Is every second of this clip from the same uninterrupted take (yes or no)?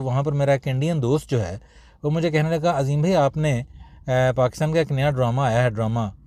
yes